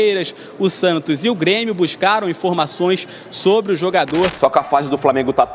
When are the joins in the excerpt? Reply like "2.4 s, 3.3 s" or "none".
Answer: 4.3 s

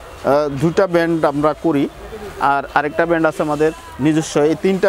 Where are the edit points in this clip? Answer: none

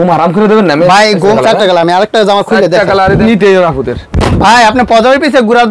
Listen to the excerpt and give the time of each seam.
1.4 s, 3.2 s

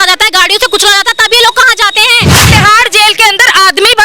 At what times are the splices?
2.5 s

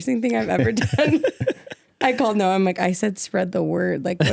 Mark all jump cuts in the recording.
none

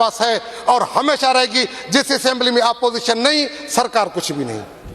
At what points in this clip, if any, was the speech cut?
none

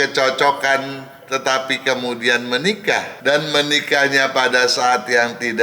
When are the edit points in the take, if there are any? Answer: 3.1 s

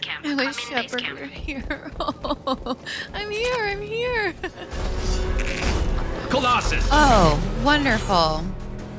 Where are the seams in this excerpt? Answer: 4.7 s

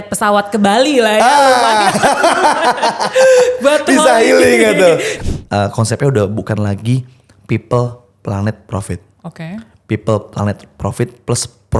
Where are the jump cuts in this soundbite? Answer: 5.1 s

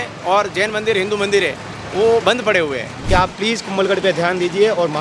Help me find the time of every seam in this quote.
2.9 s

